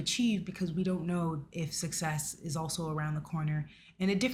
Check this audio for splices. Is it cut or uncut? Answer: uncut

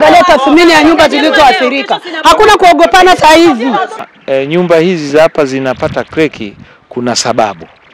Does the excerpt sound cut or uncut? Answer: cut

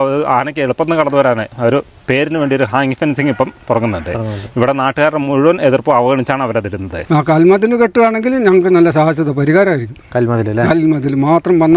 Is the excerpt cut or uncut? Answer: cut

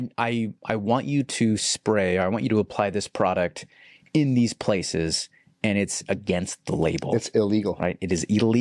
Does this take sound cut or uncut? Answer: uncut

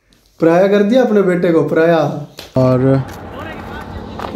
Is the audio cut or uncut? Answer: cut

